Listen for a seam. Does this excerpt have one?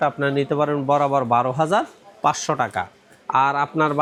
no; 0 cuts

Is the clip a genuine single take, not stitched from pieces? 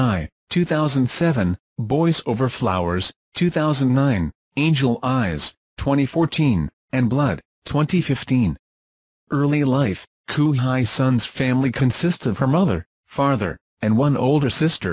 yes; 0 cuts

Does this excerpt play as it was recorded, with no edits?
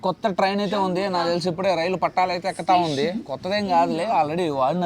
yes; 0 cuts

